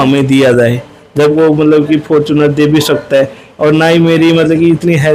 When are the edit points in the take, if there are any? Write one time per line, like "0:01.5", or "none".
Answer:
0:01.3